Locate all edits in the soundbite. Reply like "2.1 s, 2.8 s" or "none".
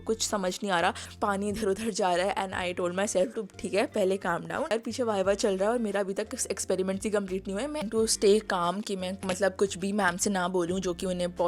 1.1 s, 4.7 s, 7.8 s